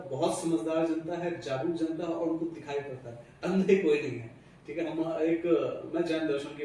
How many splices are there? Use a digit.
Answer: 0